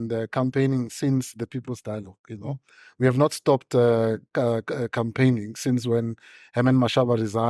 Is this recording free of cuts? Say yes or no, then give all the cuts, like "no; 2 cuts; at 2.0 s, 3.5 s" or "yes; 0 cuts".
yes; 0 cuts